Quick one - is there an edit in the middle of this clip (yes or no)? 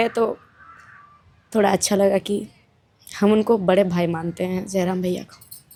no